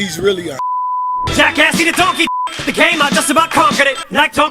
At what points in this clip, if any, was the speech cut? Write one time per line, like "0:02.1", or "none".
0:01.1